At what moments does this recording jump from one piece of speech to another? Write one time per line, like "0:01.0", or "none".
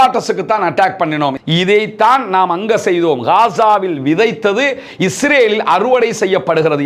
0:01.3

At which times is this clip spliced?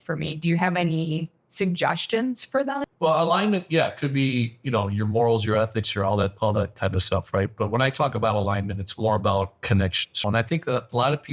0:02.9
0:10.1

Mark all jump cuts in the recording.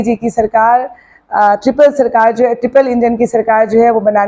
none

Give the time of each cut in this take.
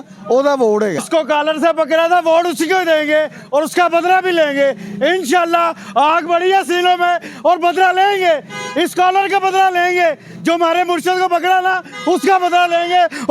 0:01.0

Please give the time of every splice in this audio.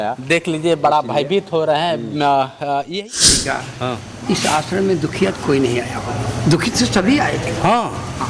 0:03.2

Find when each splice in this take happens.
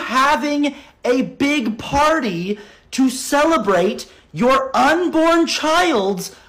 none

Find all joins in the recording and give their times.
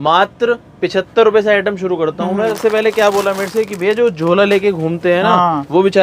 0:02.6

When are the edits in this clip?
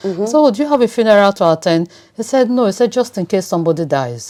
none

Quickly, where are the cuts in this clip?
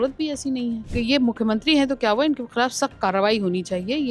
0:00.9

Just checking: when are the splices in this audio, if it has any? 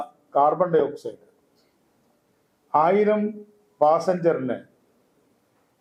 none

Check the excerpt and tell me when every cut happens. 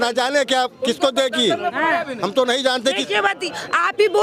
none

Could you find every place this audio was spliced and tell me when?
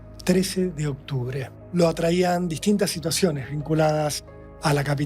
0:01.6

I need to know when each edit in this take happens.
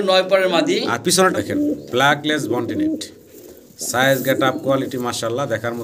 0:01.3

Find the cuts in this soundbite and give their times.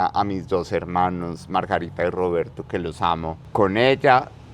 0:03.4

